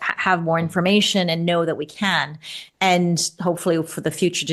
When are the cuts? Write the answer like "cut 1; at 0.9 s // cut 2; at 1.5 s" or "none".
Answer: none